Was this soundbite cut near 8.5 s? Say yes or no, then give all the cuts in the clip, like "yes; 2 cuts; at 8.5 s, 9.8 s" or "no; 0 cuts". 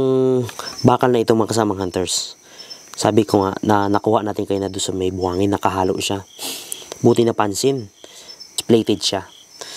yes; 1 cut; at 8.5 s